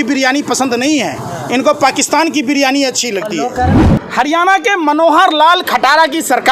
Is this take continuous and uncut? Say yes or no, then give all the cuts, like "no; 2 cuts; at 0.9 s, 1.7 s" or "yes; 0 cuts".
no; 1 cut; at 3.9 s